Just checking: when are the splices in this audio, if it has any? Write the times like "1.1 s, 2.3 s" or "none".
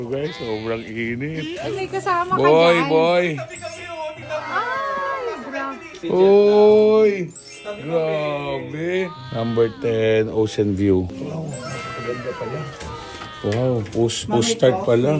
1.4 s, 9.2 s